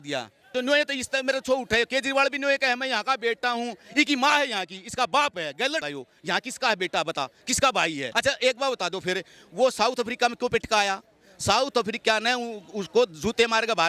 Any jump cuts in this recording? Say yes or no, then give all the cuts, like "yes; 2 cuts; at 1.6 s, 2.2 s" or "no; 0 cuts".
yes; 1 cut; at 8.1 s